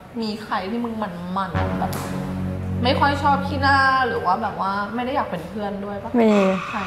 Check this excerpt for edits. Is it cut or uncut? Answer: uncut